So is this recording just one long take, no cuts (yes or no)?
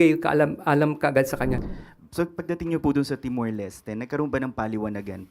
no